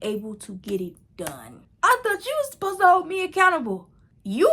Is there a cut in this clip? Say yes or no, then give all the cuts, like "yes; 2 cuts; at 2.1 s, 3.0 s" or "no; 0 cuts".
yes; 1 cut; at 1.7 s